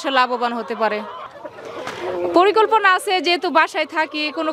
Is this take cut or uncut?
cut